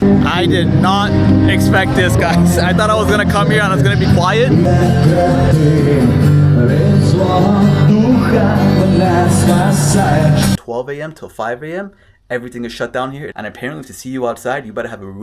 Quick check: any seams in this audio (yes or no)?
yes